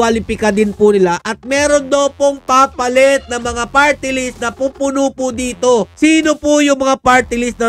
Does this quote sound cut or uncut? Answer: uncut